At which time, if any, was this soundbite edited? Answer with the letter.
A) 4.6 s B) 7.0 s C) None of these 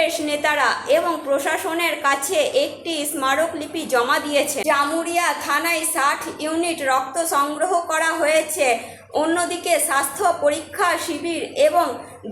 A